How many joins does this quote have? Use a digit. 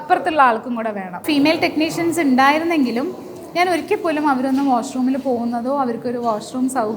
1